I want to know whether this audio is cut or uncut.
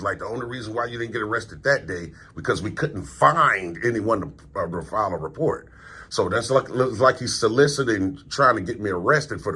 uncut